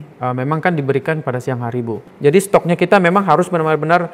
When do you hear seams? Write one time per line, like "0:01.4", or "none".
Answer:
0:02.0